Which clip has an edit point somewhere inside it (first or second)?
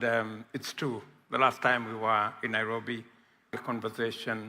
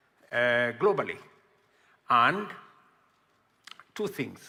first